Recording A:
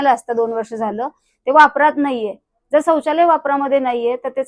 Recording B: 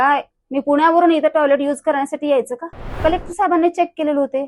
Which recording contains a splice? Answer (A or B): B